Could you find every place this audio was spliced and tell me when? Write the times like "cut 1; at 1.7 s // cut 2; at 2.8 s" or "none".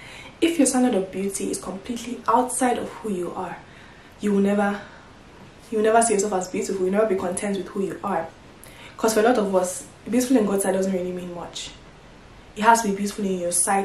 cut 1; at 8.4 s